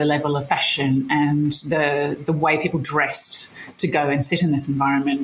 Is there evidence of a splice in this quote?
no; 0 cuts

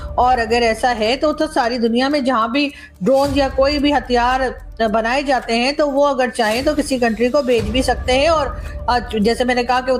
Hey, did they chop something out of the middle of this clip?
no; 0 cuts

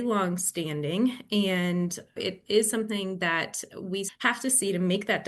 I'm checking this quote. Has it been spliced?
yes; 2 cuts; at 2.2 s, 4.1 s

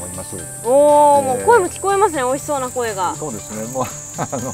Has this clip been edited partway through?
no; 0 cuts

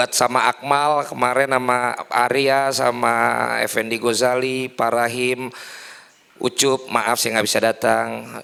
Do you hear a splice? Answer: no; 0 cuts

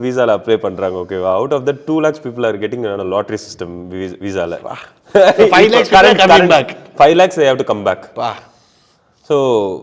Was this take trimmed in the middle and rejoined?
no; 0 cuts

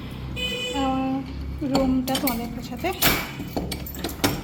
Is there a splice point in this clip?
no; 0 cuts

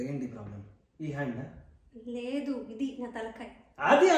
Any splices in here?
no; 0 cuts

